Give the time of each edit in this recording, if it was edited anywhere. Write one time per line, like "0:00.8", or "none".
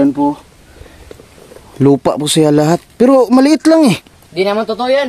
0:04.2